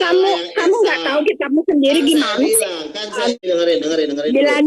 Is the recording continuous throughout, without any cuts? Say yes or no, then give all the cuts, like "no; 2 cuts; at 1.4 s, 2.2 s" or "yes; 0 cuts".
no; 1 cut; at 3.3 s